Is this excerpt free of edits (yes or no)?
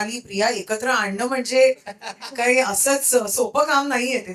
yes